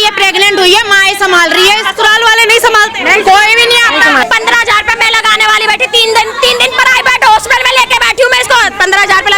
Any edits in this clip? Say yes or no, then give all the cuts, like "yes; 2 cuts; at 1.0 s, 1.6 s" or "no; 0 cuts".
yes; 1 cut; at 4.2 s